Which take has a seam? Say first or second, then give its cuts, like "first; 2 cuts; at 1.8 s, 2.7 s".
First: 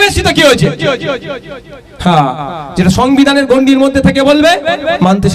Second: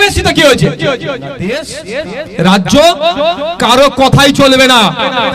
second; 1 cut; at 1.4 s